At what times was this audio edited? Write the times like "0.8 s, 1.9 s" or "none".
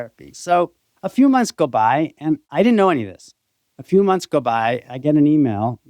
2.5 s